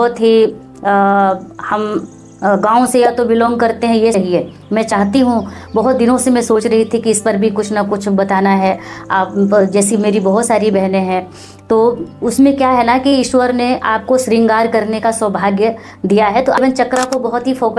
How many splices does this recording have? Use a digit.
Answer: 2